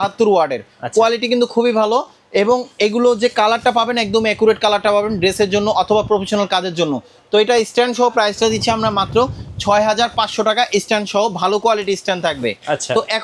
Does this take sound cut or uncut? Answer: uncut